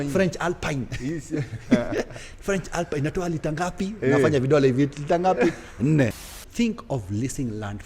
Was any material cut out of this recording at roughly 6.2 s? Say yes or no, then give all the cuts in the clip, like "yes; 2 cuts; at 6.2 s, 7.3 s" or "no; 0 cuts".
yes; 1 cut; at 6.2 s